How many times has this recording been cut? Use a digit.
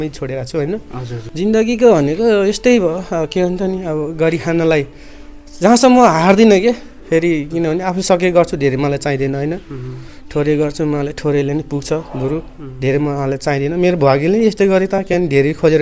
1